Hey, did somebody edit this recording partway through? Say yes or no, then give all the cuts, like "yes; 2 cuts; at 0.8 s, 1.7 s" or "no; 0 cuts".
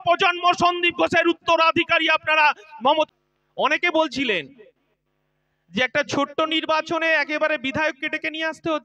yes; 1 cut; at 3.1 s